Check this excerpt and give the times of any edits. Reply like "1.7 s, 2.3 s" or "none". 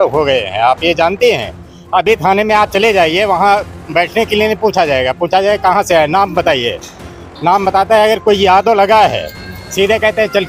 none